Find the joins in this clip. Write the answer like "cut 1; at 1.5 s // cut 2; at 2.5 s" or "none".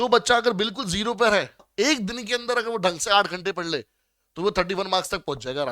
cut 1; at 1.6 s